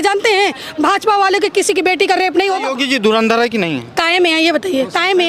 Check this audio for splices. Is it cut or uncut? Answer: cut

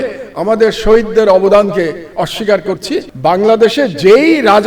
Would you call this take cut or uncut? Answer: cut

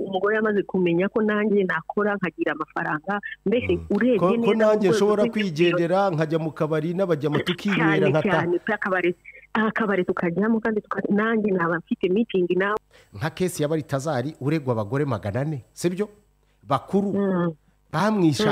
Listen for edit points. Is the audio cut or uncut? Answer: cut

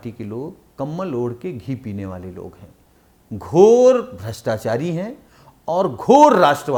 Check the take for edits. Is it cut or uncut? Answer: uncut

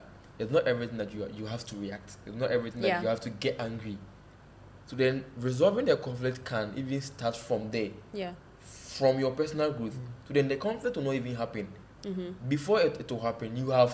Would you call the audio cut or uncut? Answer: uncut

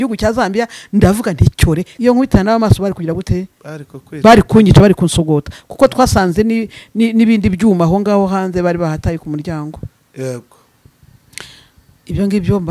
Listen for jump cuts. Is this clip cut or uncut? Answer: cut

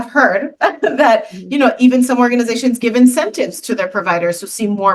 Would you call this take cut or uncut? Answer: uncut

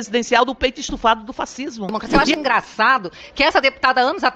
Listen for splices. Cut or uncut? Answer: cut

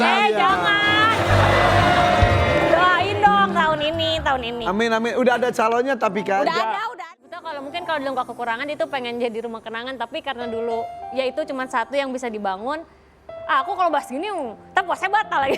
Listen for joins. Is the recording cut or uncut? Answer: cut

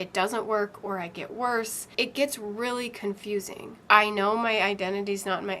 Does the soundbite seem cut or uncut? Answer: cut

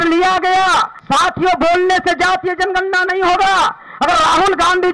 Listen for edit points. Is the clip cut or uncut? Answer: cut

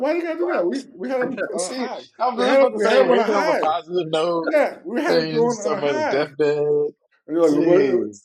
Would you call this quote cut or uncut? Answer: uncut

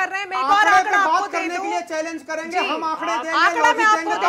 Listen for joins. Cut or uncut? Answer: uncut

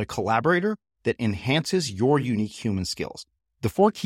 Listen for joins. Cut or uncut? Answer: uncut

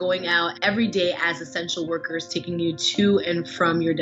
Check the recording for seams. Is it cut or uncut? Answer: uncut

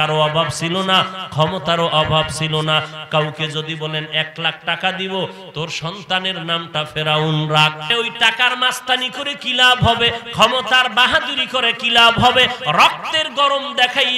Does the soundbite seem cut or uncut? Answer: cut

